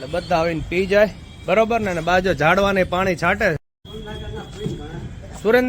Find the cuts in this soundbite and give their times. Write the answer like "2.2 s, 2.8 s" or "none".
3.6 s